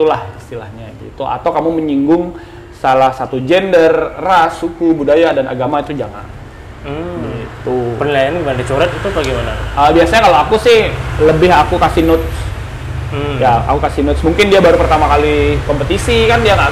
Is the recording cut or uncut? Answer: uncut